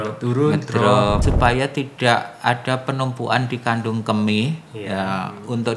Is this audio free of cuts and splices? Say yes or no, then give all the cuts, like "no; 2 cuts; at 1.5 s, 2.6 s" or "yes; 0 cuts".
no; 1 cut; at 1.2 s